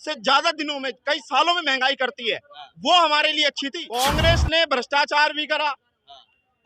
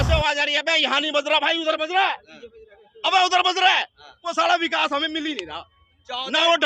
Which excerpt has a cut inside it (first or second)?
first